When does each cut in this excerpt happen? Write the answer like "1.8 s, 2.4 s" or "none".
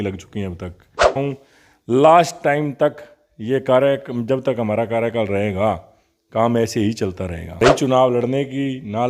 1.1 s, 7.6 s